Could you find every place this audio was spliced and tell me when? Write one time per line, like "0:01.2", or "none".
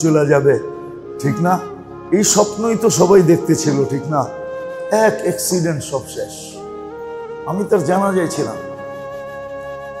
none